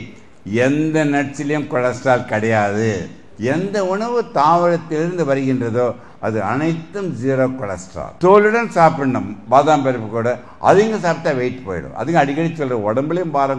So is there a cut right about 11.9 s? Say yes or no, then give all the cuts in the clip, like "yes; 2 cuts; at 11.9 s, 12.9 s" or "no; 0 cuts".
no; 0 cuts